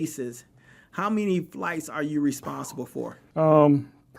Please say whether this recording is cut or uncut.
cut